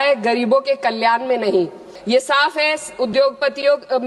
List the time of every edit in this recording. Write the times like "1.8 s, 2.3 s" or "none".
1.9 s